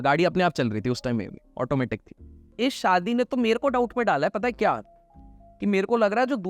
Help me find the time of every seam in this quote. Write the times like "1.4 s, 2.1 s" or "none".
2.5 s